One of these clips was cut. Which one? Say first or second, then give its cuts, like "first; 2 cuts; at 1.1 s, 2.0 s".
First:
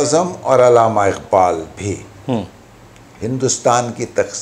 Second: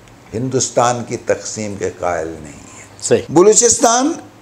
second; 1 cut; at 3.3 s